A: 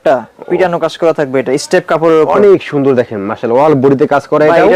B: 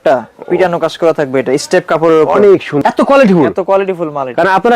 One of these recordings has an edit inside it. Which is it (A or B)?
B